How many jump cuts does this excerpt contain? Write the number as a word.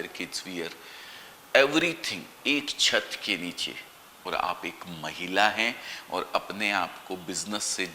one